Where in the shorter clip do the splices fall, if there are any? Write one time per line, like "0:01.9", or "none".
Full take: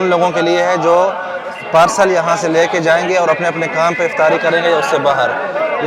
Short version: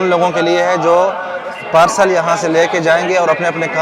none